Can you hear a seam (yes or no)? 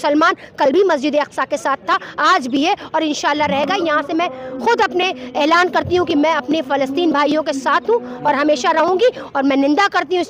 no